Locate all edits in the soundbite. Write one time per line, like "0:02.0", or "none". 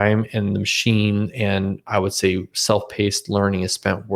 none